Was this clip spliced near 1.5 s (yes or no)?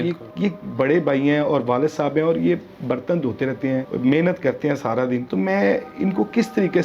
no